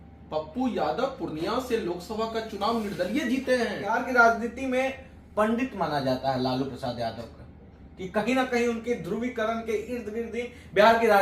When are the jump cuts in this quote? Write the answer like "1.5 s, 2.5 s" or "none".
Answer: 4.0 s